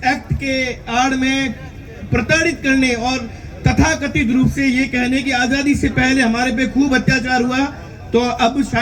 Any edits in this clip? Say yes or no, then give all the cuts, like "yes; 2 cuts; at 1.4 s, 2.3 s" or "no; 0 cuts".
no; 0 cuts